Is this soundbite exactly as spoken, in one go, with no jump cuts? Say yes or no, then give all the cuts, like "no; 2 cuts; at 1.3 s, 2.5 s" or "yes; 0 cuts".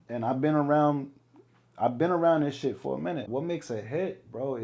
no; 1 cut; at 3.3 s